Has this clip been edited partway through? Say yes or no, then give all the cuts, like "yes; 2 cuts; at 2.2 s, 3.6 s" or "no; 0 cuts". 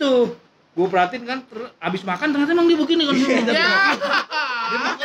no; 0 cuts